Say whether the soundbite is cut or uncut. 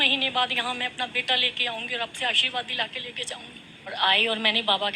cut